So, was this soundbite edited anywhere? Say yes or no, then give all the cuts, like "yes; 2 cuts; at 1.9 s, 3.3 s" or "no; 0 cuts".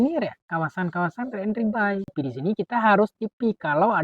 yes; 1 cut; at 2.1 s